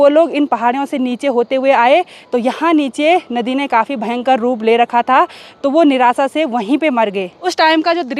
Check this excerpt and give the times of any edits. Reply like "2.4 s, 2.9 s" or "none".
none